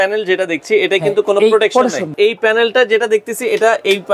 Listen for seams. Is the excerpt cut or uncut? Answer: cut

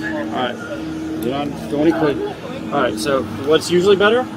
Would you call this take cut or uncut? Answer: uncut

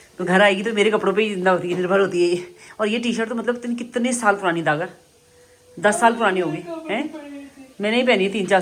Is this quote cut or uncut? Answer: uncut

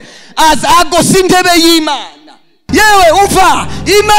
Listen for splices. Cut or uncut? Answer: cut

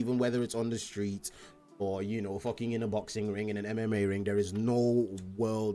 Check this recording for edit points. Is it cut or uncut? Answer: uncut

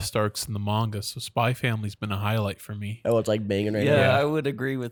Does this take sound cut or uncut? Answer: uncut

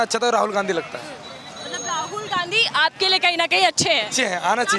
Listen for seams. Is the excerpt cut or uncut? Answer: uncut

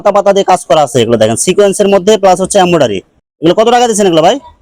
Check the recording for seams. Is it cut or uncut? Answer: uncut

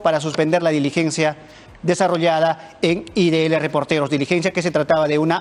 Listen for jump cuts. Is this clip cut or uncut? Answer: uncut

